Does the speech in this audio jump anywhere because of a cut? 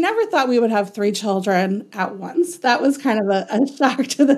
no; 0 cuts

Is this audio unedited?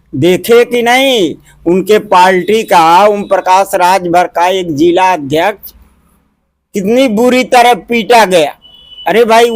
yes; 0 cuts

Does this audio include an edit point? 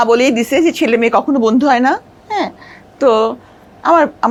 no; 0 cuts

